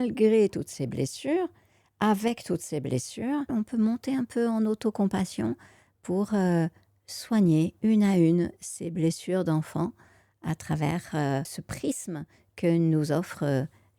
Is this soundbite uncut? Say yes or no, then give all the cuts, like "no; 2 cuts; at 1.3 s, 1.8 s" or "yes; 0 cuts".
no; 2 cuts; at 3.5 s, 11.6 s